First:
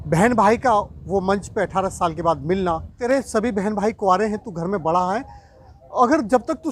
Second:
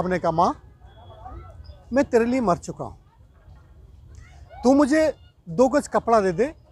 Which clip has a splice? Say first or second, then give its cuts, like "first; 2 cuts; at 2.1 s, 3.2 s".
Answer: first; 1 cut; at 3.0 s